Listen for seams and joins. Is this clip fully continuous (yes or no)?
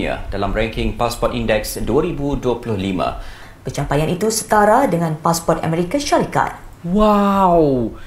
no